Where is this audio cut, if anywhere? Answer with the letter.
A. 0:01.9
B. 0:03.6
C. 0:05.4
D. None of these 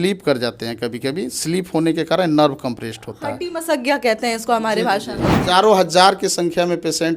C